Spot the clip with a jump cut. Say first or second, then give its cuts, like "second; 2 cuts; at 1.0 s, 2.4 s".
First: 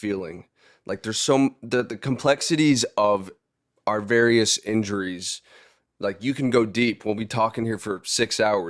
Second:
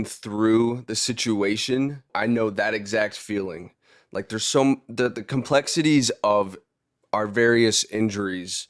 second; 1 cut; at 2.1 s